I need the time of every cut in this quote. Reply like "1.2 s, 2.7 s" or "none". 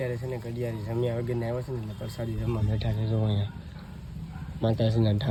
none